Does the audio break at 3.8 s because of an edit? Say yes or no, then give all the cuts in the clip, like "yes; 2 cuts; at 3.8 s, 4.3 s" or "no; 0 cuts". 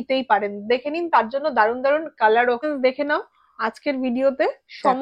no; 1 cut; at 2.6 s